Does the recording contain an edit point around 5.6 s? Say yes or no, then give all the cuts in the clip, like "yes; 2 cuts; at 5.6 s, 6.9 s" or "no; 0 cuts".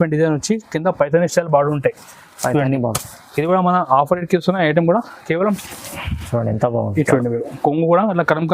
yes; 1 cut; at 5.6 s